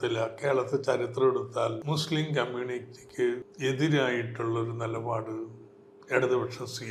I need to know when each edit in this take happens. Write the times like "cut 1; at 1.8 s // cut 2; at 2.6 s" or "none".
cut 1; at 1.8 s // cut 2; at 3.5 s